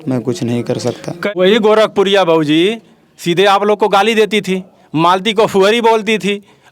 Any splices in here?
yes; 1 cut; at 1.2 s

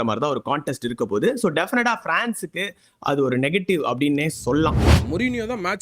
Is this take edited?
yes; 1 cut; at 4.9 s

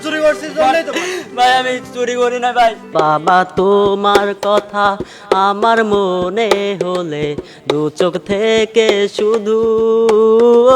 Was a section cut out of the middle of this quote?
yes; 1 cut; at 2.9 s

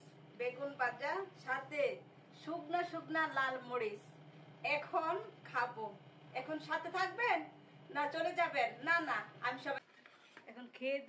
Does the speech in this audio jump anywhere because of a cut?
yes; 1 cut; at 9.8 s

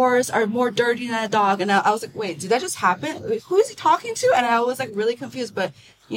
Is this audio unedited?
yes; 0 cuts

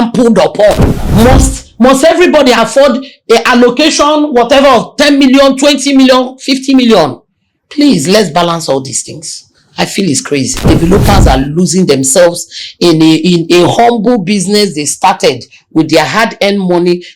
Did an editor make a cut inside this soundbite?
yes; 2 cuts; at 0.9 s, 10.6 s

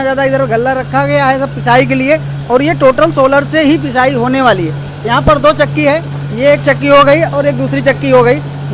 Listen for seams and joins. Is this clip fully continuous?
yes; 0 cuts

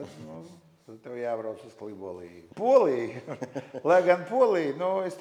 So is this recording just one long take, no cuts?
no; 1 cut; at 2.4 s

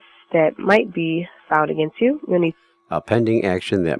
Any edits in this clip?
no; 0 cuts

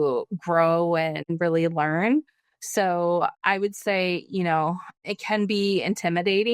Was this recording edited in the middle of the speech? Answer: yes; 2 cuts; at 1.3 s, 5.0 s

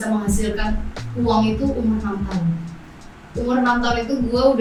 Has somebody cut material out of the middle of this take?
no; 0 cuts

